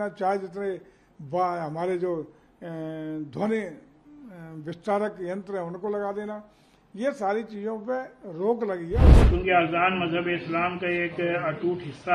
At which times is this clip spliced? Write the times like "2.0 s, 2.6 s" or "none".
9.1 s

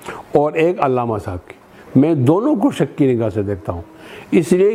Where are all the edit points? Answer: none

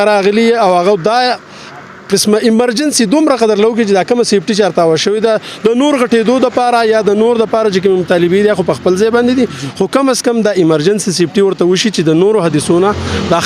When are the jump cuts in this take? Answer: none

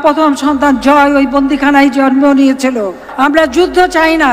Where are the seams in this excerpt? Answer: 3.0 s

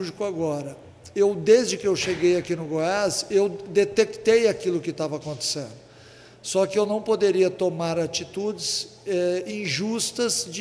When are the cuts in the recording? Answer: none

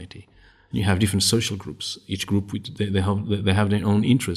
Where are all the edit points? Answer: none

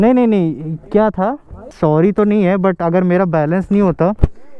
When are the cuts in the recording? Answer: 1.7 s

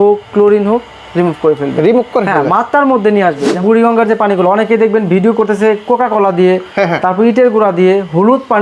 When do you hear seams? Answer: 3.5 s

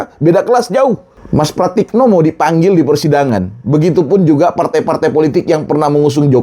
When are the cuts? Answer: 1.1 s

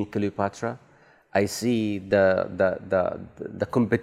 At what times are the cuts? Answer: none

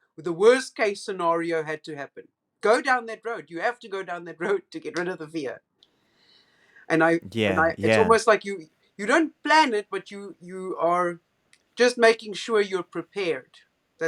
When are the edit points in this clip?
none

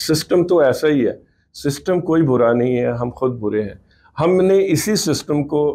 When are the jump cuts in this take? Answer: none

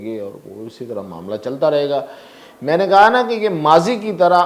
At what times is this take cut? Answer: none

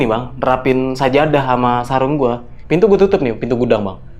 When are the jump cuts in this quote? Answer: 2.5 s

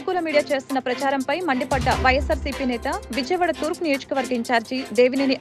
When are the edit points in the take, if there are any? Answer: none

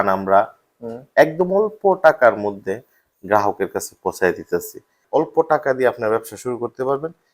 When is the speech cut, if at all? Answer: 5.0 s

